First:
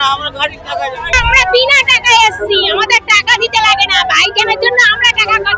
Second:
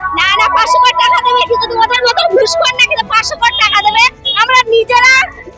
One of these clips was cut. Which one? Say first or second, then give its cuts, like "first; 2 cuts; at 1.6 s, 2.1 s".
first; 1 cut; at 1.1 s